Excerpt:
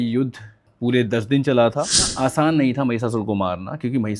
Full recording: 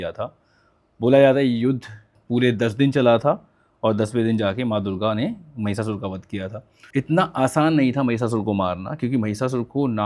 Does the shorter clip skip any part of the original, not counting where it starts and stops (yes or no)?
yes